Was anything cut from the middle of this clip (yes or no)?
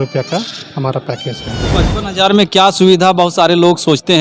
yes